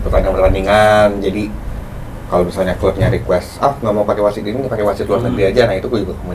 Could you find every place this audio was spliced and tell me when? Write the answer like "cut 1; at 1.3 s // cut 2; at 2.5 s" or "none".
none